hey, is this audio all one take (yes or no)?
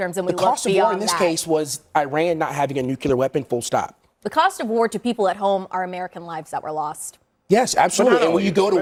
yes